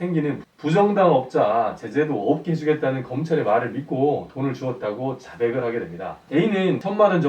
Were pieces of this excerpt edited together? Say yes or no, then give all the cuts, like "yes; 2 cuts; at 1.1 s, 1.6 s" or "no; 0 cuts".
yes; 1 cut; at 6.3 s